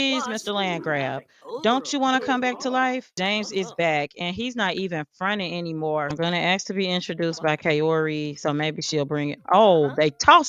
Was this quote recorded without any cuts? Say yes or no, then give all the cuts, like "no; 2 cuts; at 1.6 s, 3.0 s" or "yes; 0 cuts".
no; 2 cuts; at 3.1 s, 6.1 s